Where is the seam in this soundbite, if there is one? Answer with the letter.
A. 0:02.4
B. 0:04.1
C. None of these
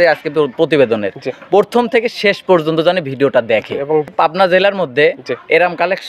B